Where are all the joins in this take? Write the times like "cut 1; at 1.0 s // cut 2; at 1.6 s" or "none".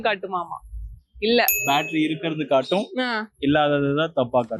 none